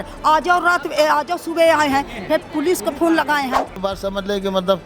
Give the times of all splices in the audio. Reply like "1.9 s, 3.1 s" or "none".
3.9 s

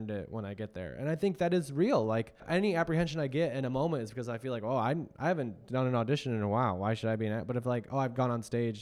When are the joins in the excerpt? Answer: 2.5 s

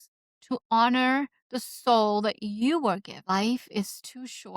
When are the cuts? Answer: 3.2 s

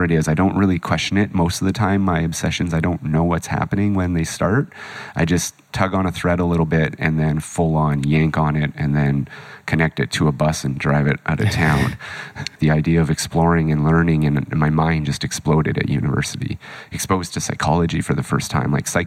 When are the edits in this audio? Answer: 5.6 s, 12.5 s

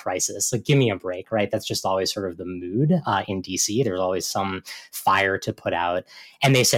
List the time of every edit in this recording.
none

